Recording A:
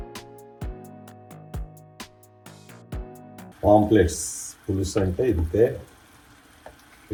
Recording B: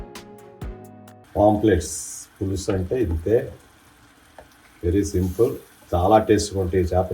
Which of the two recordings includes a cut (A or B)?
B